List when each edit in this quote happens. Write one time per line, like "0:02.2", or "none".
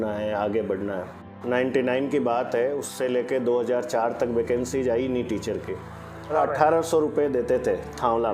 0:01.3
0:06.3